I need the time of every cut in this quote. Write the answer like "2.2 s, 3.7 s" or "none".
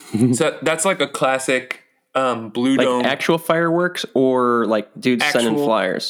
none